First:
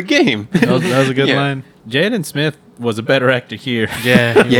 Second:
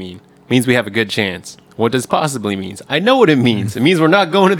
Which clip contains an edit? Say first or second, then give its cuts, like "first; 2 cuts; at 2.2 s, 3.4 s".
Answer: first; 1 cut; at 1.8 s